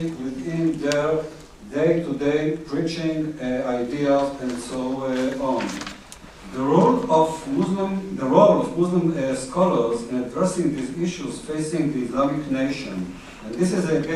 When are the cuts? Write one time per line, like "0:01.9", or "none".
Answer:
none